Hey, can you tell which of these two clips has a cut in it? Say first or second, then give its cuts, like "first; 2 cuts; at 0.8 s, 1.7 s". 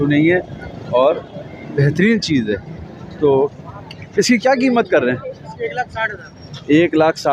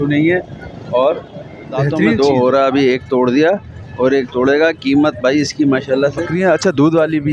second; 2 cuts; at 2.2 s, 6.3 s